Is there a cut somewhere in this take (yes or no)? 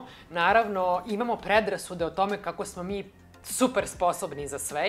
no